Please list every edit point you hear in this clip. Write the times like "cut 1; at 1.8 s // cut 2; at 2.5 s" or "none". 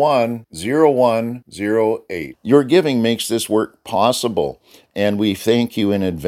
none